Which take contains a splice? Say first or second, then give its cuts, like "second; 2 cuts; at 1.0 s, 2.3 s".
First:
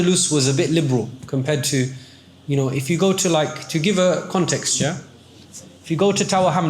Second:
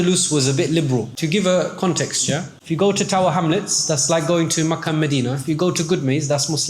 second; 2 cuts; at 1.1 s, 2.5 s